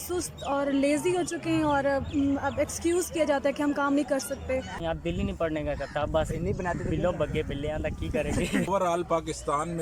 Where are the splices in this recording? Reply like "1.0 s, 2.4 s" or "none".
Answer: 4.8 s, 8.7 s